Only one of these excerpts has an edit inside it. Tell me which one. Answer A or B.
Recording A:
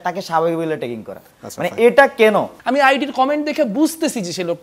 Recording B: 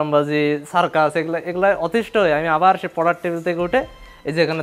A